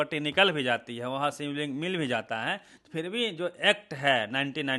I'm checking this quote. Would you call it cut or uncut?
uncut